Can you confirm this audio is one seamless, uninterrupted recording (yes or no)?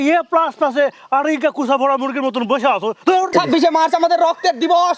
no